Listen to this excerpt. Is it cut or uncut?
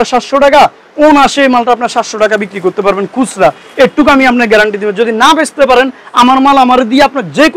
uncut